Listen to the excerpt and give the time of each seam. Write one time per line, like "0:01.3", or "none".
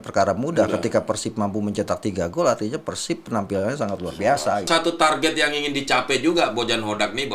0:04.7

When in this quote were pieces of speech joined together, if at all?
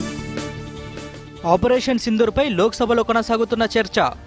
none

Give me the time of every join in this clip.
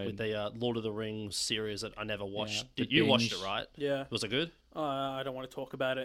0:04.1

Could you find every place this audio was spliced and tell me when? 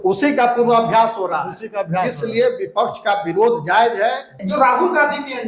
0:04.4

